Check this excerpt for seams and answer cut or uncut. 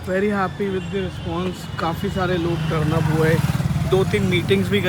uncut